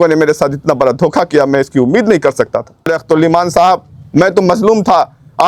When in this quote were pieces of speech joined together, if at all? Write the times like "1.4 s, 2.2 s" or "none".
3.0 s